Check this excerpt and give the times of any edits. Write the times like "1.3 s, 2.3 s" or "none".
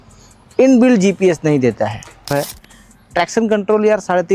2.3 s